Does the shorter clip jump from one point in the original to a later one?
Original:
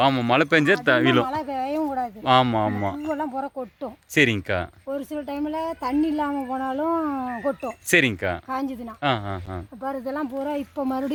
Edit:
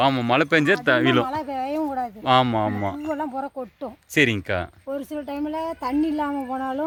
no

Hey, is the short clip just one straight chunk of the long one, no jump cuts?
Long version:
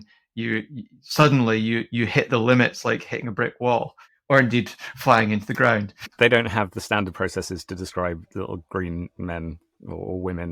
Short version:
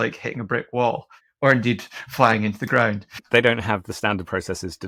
yes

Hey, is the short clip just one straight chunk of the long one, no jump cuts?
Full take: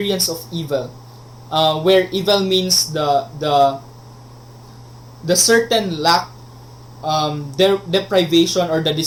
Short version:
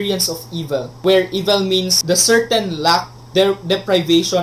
no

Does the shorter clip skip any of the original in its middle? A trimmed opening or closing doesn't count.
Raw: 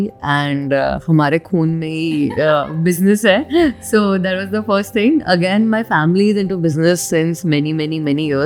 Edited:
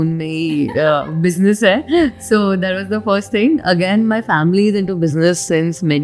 no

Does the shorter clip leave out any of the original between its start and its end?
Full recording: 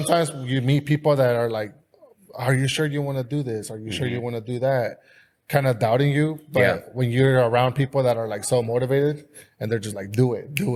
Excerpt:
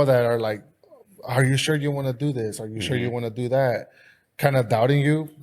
no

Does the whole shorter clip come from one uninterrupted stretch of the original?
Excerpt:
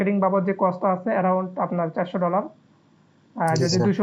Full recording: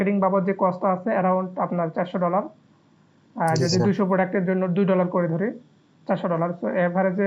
yes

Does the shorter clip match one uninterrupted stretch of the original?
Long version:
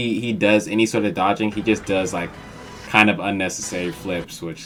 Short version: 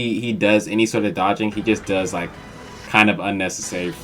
yes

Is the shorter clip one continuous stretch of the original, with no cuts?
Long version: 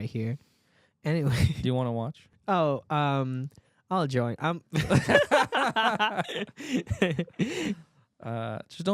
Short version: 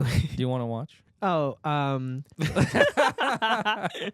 no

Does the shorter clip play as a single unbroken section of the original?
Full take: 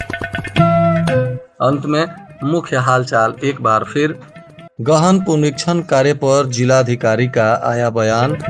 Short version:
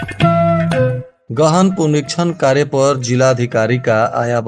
no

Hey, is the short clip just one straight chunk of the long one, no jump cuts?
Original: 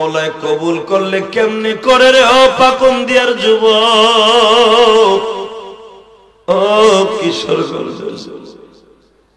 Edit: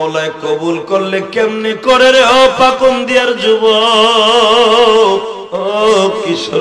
no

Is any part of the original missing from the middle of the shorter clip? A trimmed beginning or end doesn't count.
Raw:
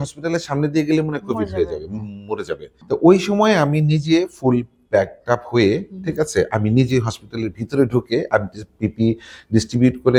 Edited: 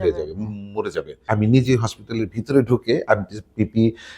yes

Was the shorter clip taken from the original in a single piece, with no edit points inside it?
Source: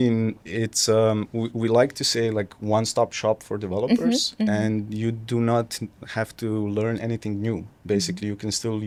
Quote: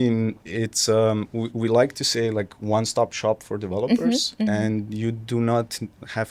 yes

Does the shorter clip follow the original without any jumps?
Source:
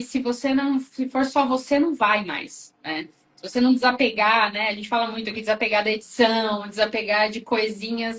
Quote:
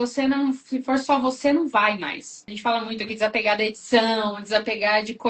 no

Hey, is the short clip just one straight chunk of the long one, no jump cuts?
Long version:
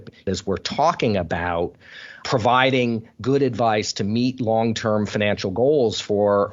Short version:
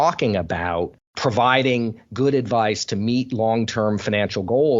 no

